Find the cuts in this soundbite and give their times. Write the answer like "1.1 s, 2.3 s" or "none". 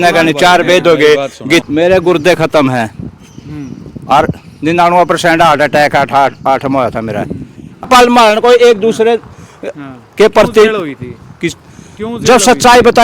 1.6 s, 7.8 s